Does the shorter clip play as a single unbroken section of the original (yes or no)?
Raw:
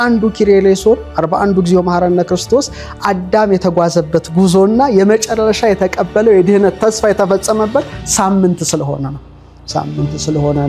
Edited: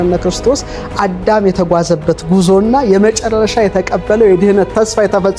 yes